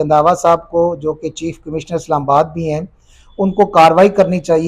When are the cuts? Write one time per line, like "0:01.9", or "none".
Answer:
none